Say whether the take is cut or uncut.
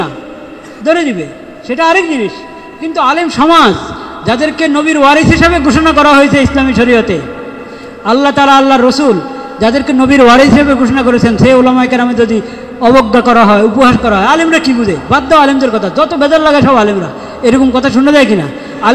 uncut